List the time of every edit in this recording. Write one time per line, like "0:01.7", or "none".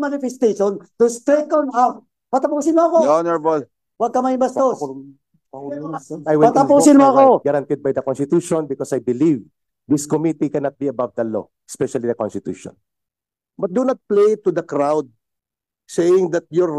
0:07.4
0:12.9